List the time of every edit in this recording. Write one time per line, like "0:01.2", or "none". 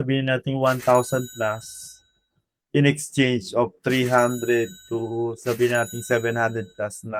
none